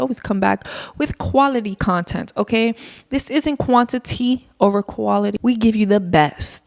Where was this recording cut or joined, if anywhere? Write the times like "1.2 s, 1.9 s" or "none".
5.3 s